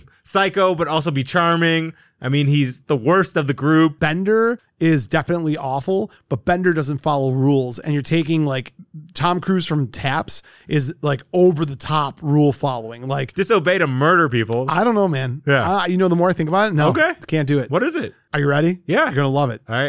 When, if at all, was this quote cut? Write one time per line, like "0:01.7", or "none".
0:04.0
0:13.3